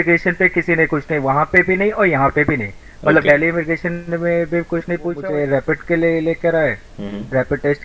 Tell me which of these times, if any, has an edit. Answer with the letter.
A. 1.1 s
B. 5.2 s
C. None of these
B